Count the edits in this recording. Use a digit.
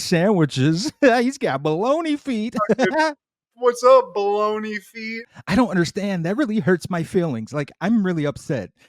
1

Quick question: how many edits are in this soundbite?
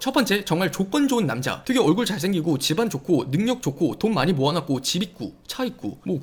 0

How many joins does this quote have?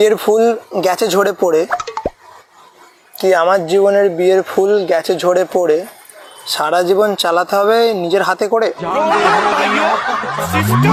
0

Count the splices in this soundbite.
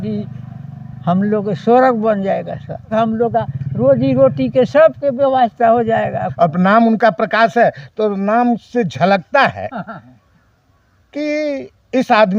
2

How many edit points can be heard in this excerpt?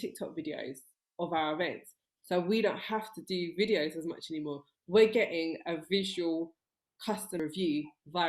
1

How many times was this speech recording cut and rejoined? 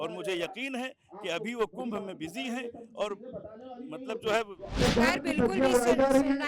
1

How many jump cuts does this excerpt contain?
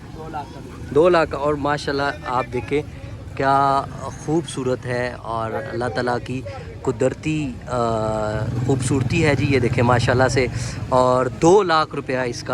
0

